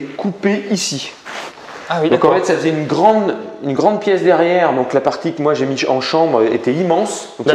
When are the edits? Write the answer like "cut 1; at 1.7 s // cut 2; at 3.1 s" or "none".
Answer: none